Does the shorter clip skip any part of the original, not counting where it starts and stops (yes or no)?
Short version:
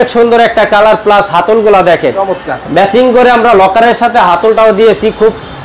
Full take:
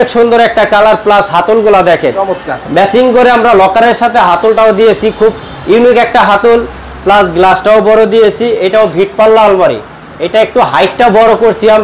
no